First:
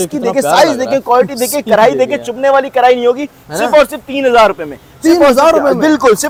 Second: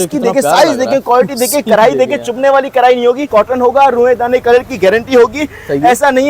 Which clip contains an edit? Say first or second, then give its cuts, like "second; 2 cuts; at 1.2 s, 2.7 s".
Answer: second; 1 cut; at 3.2 s